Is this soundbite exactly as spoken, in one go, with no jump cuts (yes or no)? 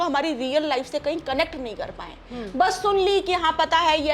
yes